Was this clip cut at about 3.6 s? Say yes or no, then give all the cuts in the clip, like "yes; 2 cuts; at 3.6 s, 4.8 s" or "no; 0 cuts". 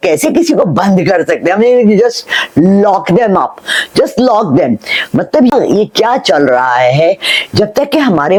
no; 0 cuts